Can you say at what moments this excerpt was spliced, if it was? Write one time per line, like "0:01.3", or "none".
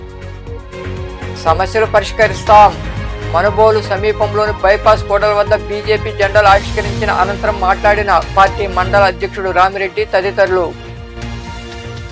0:01.4